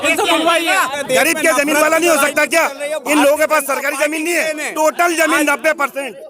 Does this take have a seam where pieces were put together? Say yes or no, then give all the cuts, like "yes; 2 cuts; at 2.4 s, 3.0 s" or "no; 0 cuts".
yes; 1 cut; at 1.0 s